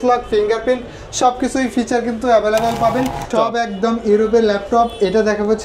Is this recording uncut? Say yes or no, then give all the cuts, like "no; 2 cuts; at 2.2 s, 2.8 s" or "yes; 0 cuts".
no; 1 cut; at 3.3 s